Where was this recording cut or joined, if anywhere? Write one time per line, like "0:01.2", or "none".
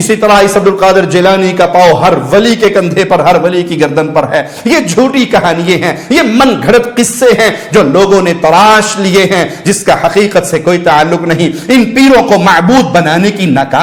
none